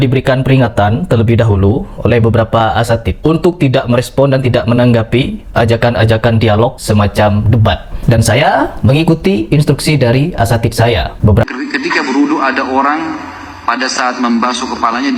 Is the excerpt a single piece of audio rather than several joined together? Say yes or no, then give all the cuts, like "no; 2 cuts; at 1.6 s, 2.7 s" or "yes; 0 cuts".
yes; 0 cuts